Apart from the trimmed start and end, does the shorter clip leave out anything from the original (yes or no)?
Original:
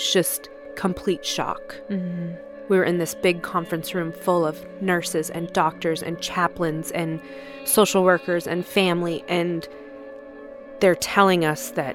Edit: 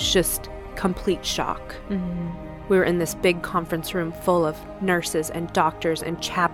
no